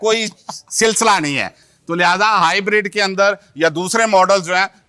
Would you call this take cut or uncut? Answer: uncut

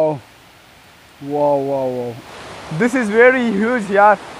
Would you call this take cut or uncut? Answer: cut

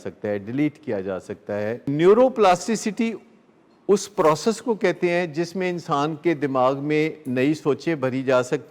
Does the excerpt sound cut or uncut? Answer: cut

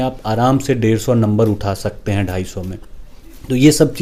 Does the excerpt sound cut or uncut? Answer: uncut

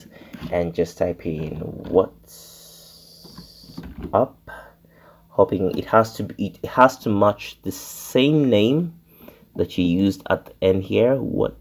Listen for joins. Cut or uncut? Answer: uncut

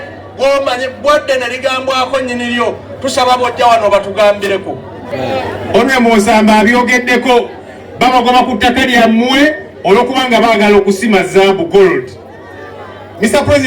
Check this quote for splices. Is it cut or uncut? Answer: cut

